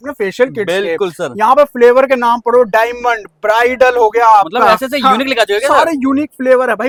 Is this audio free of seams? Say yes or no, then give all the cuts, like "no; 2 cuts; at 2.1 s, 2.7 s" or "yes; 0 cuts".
yes; 0 cuts